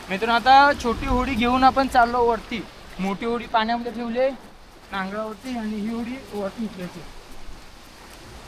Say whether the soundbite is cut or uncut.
uncut